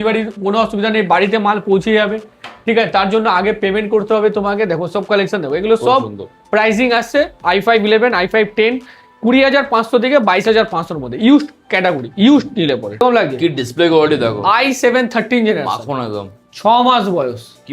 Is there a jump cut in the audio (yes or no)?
yes